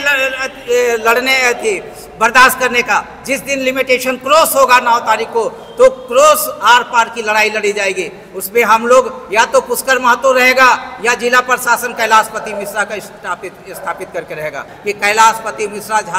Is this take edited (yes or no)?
yes